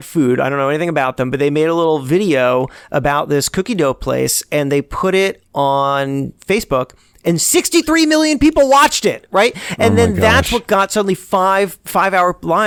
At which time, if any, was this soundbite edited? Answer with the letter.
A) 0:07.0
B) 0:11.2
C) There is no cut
C